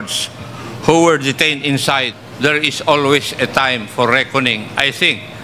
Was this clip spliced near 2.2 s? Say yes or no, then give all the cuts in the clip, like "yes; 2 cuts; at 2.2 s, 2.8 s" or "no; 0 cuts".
yes; 1 cut; at 2.2 s